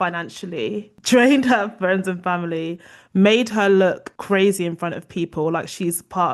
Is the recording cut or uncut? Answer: uncut